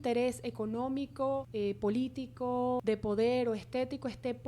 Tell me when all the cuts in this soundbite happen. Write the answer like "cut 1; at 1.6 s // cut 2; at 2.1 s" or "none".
cut 1; at 1.5 s // cut 2; at 2.8 s